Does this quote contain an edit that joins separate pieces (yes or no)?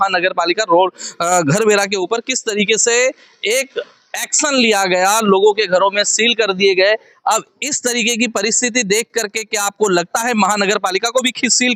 no